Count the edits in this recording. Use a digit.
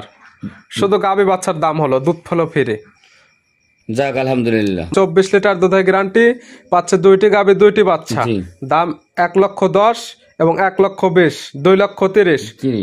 1